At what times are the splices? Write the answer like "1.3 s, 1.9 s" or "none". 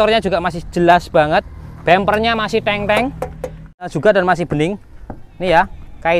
3.8 s